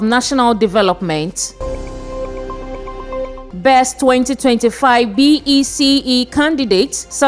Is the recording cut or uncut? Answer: cut